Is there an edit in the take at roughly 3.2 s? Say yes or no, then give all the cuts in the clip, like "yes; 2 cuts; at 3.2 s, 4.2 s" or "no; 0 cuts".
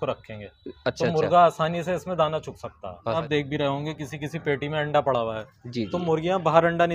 yes; 1 cut; at 3.2 s